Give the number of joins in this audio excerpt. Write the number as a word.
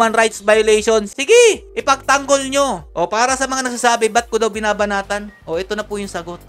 zero